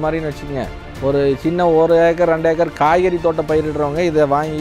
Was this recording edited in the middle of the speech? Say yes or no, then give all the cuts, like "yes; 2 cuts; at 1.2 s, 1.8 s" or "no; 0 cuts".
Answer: no; 0 cuts